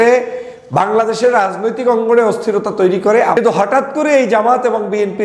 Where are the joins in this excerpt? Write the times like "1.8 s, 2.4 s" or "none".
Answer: 3.4 s